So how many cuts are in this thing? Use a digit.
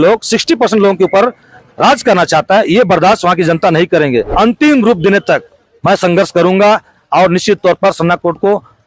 1